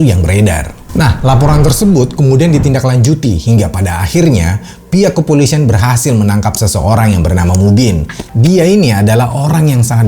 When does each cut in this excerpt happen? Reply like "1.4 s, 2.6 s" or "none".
8.2 s